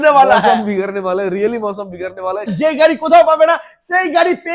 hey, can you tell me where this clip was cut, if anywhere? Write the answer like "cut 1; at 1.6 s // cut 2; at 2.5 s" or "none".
cut 1; at 2.5 s